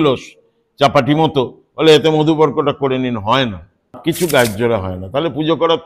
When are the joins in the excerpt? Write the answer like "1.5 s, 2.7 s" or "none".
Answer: 4.0 s